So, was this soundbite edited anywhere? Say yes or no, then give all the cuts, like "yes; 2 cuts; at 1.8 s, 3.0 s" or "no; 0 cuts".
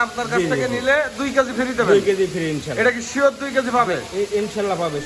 no; 0 cuts